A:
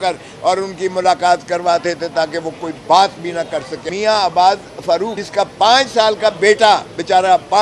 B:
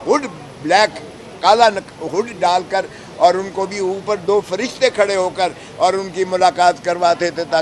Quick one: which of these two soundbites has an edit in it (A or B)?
A